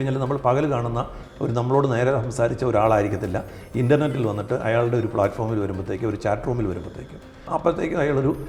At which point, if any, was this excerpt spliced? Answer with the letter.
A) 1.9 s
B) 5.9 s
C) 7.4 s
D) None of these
C